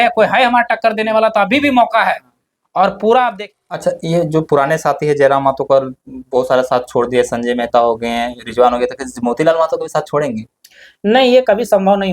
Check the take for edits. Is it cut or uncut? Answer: cut